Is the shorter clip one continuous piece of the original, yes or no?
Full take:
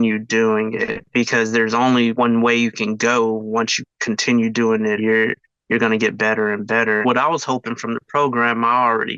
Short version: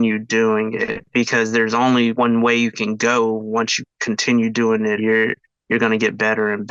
yes